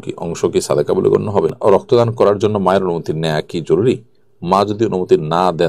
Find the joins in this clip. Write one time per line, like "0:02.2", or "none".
0:01.5

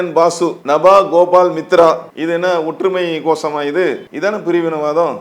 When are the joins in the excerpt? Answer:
0:02.1
0:04.1

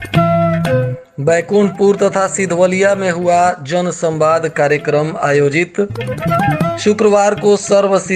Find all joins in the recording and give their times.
0:01.0

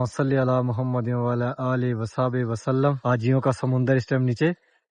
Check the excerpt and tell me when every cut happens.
0:03.0

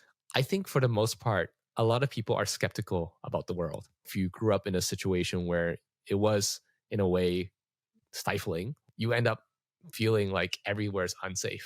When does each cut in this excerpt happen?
0:04.0
0:08.8

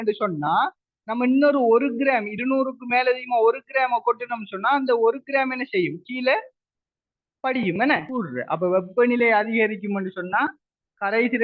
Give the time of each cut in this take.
0:08.1

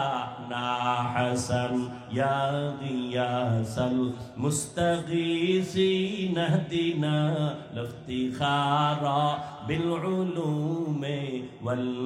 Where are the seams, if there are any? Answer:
none

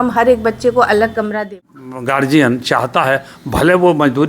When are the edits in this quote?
0:01.5

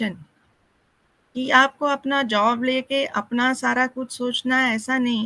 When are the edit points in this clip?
none

